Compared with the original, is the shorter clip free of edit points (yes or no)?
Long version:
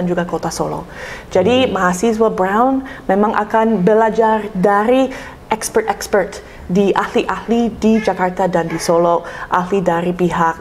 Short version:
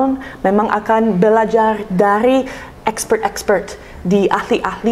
yes